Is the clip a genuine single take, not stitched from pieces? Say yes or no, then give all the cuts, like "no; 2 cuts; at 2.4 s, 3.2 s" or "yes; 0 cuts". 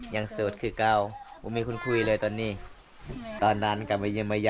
no; 1 cut; at 3.3 s